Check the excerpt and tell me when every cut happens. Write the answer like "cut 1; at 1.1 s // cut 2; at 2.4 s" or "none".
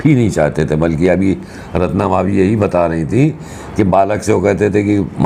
none

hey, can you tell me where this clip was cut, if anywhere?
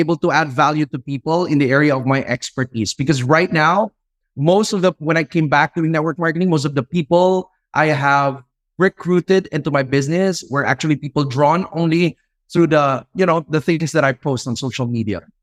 none

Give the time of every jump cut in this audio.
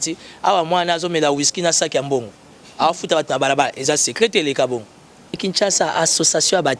cut 1; at 5.4 s

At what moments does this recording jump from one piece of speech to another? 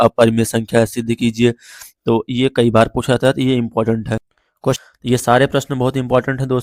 cut 1; at 4.8 s

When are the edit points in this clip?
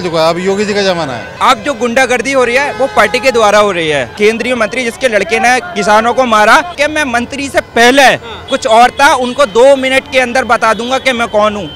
cut 1; at 1.2 s // cut 2; at 4.1 s // cut 3; at 6.7 s

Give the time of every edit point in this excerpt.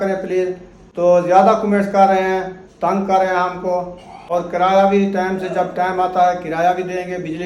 cut 1; at 4.3 s

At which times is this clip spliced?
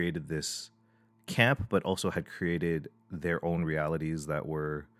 none

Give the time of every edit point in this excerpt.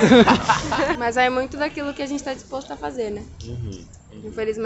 cut 1; at 0.9 s

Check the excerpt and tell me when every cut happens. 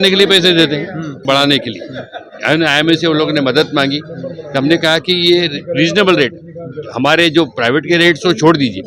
cut 1; at 1.2 s

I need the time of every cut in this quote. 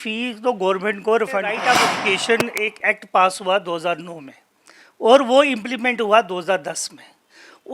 cut 1; at 1.7 s

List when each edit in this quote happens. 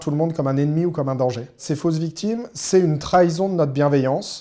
cut 1; at 1.7 s

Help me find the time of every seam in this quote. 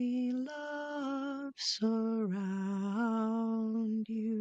none

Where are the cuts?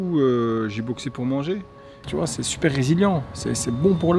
cut 1; at 2.1 s

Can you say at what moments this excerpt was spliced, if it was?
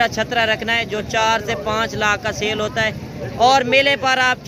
none

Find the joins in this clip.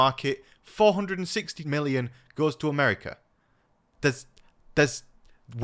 cut 1; at 1.6 s

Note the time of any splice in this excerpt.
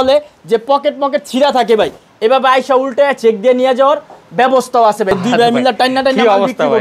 cut 1; at 5.2 s

